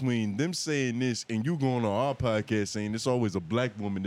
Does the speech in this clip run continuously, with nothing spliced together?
yes; 0 cuts

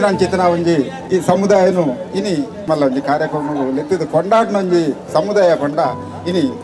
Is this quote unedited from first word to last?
no; 2 cuts; at 1.0 s, 2.6 s

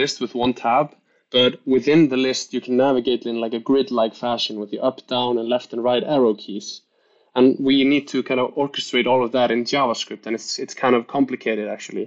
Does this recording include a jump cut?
no; 0 cuts

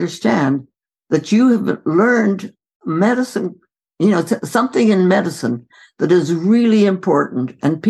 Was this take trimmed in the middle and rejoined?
yes; 1 cut; at 2.5 s

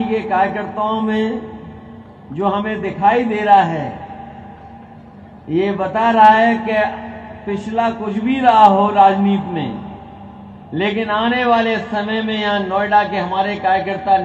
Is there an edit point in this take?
no; 0 cuts

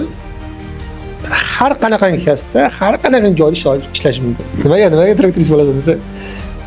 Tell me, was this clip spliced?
yes; 1 cut; at 4.6 s

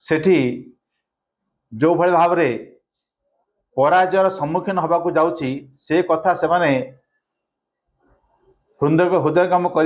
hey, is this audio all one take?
yes; 0 cuts

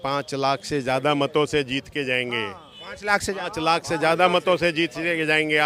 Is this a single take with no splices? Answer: yes; 0 cuts

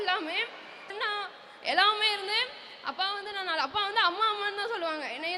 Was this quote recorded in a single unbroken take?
no; 1 cut; at 0.9 s

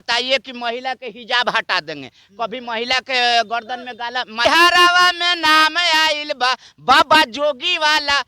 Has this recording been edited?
yes; 1 cut; at 4.4 s

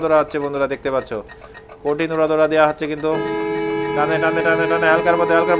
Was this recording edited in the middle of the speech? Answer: no; 0 cuts

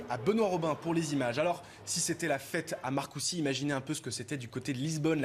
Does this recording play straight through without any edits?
no; 1 cut; at 4.0 s

